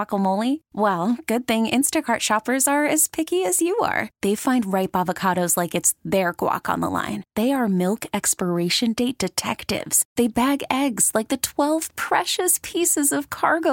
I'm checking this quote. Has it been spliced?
no; 0 cuts

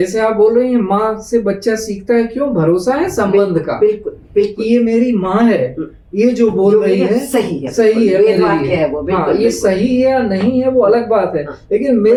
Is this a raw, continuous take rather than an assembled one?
yes; 0 cuts

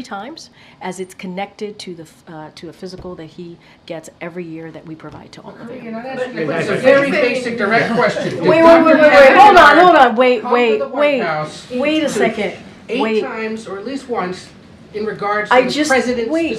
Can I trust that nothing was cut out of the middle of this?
yes; 0 cuts

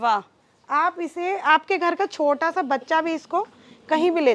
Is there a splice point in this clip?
no; 0 cuts

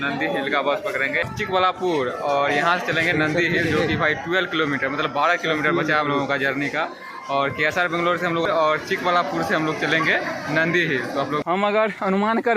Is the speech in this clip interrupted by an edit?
yes; 3 cuts; at 1.2 s, 8.5 s, 11.4 s

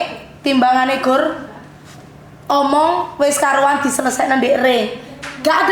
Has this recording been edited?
no; 0 cuts

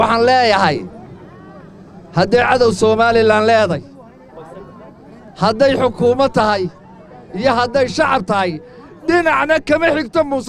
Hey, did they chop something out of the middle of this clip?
no; 0 cuts

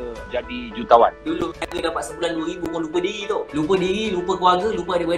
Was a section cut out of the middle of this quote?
no; 0 cuts

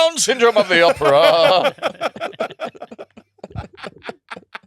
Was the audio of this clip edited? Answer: no; 0 cuts

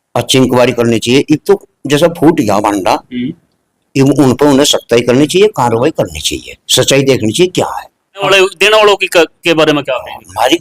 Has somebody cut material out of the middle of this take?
yes; 1 cut; at 8.2 s

